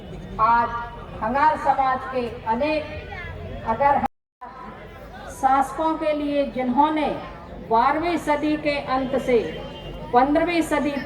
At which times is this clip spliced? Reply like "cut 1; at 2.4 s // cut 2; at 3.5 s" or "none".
cut 1; at 4.3 s